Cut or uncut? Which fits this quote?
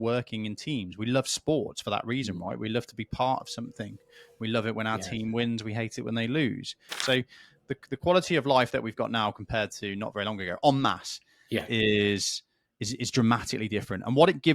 cut